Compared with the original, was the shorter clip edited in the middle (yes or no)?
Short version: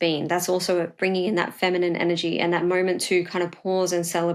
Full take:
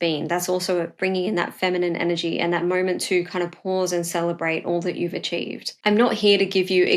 no